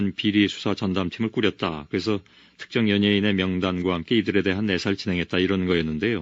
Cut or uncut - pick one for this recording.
cut